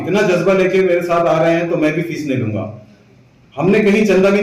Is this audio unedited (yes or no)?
yes